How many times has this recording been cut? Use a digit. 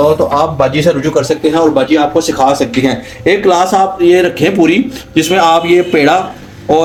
0